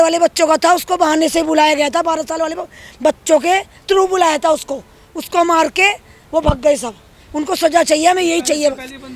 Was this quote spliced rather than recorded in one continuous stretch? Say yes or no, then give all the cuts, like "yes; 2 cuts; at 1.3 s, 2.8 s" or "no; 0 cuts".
no; 0 cuts